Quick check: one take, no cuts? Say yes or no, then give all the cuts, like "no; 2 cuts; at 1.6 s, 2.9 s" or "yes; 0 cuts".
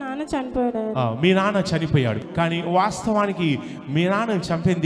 no; 1 cut; at 2.2 s